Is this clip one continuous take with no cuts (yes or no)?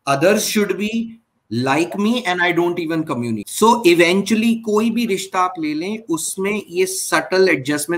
no